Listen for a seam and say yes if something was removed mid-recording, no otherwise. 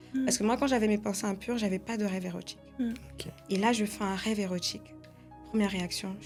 no